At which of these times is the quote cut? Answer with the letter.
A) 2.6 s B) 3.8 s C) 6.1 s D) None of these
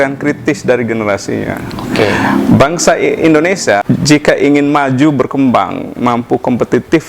B